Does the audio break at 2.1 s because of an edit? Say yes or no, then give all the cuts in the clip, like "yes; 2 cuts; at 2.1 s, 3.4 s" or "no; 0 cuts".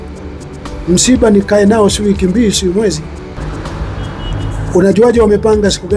no; 1 cut; at 3.3 s